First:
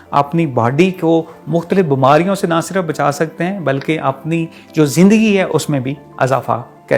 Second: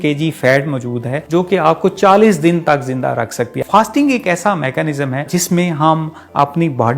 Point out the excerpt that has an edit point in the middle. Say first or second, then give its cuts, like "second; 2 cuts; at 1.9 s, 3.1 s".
second; 3 cuts; at 1.2 s, 3.6 s, 5.3 s